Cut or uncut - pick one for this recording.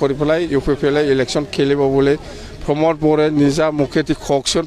uncut